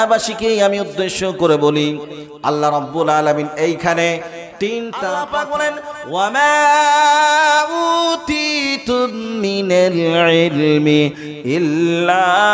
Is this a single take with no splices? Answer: no; 1 cut; at 5.0 s

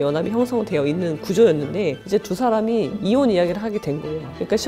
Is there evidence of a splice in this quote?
no; 0 cuts

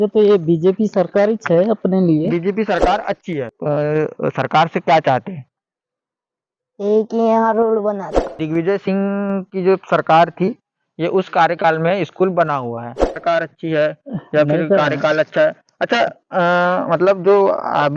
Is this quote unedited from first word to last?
no; 3 cuts; at 3.5 s, 8.3 s, 13.2 s

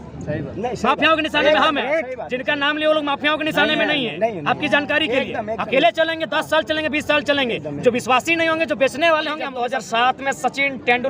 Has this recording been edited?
yes; 1 cut; at 9.5 s

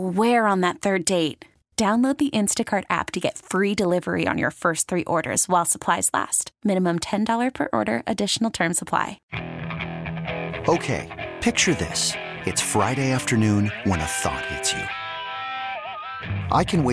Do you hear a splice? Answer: yes; 1 cut; at 9.2 s

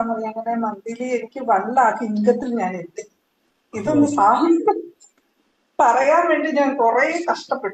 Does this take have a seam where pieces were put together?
no; 0 cuts

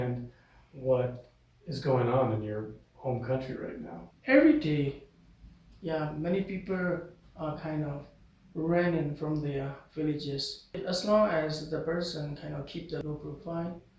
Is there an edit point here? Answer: yes; 3 cuts; at 4.1 s, 10.8 s, 13.0 s

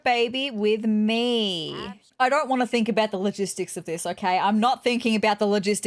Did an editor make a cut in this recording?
yes; 1 cut; at 2.0 s

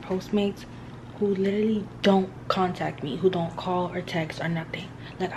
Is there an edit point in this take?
no; 0 cuts

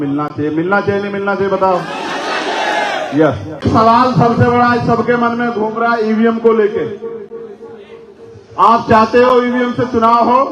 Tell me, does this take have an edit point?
yes; 1 cut; at 3.6 s

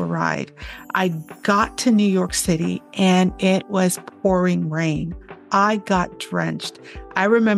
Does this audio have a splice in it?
no; 0 cuts

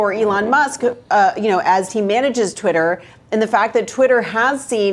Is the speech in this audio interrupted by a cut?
no; 0 cuts

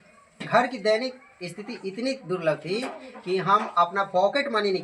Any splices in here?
no; 0 cuts

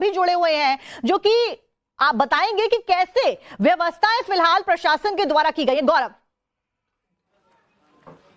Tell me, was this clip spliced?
no; 0 cuts

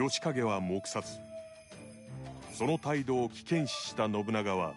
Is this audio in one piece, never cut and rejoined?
yes; 0 cuts

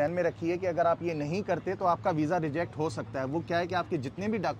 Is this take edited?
no; 0 cuts

